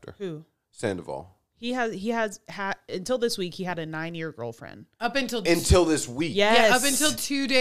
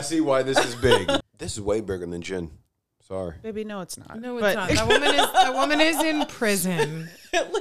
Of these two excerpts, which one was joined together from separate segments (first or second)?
second